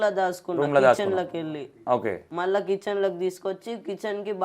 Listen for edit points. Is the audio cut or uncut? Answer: cut